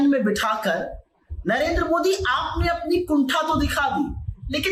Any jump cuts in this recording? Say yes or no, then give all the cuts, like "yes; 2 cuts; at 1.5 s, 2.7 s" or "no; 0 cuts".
no; 0 cuts